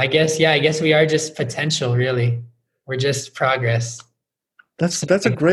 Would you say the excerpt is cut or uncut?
uncut